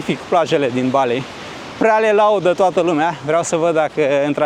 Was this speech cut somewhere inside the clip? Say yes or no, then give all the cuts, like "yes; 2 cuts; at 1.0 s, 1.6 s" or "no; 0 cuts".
no; 0 cuts